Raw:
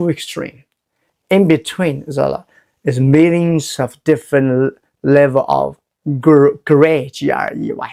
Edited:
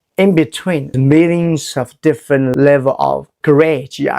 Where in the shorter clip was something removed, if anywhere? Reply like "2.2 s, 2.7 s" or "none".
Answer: 0.9 s, 2.5 s, 3.4 s